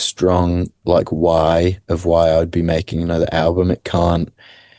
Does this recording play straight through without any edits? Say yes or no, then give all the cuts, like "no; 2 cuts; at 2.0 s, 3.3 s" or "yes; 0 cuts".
yes; 0 cuts